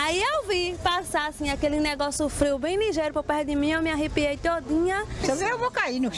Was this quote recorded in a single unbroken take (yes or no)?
yes